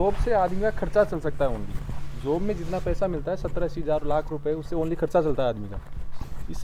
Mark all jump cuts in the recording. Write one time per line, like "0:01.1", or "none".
none